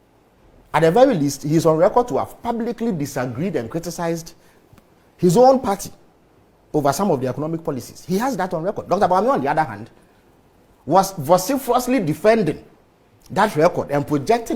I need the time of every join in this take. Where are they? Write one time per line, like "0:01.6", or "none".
none